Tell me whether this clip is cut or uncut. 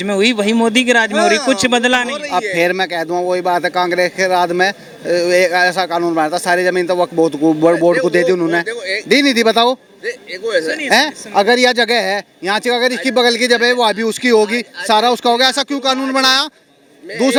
uncut